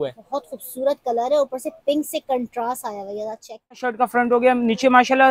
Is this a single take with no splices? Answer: no; 1 cut; at 3.9 s

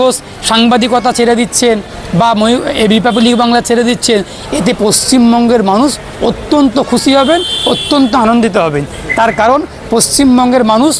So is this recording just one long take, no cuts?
yes; 0 cuts

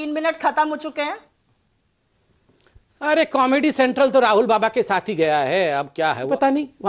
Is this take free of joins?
yes; 0 cuts

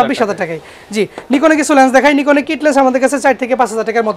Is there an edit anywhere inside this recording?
no; 0 cuts

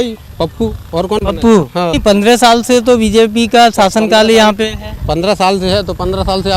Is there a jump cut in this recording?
yes; 1 cut; at 2.0 s

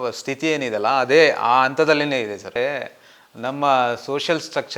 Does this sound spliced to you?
yes; 1 cut; at 2.6 s

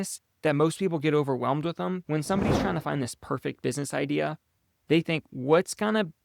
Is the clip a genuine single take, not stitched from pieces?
no; 1 cut; at 2.0 s

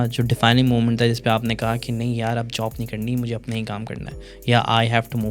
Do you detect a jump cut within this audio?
no; 0 cuts

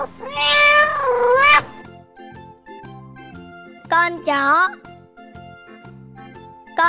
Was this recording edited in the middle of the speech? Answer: yes; 2 cuts; at 2.2 s, 3.9 s

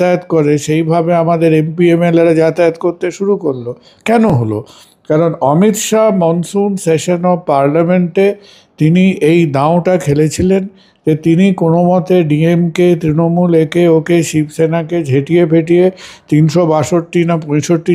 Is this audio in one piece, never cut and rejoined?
yes; 0 cuts

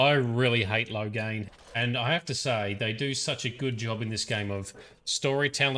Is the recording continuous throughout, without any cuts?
no; 1 cut; at 1.4 s

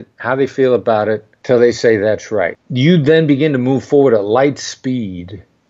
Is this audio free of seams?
no; 2 cuts; at 1.3 s, 2.6 s

